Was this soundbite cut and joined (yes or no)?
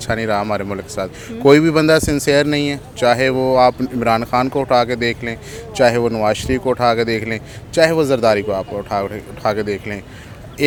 no